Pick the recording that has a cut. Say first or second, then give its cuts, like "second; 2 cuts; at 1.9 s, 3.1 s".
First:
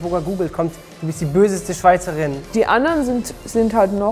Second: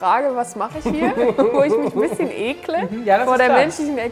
first; 1 cut; at 2.4 s